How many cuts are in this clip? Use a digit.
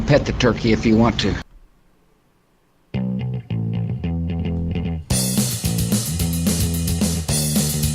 1